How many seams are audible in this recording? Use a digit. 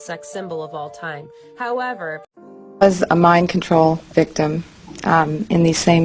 1